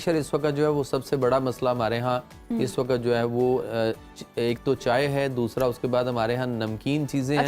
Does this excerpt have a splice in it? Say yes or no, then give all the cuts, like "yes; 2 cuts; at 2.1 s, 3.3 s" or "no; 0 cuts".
no; 0 cuts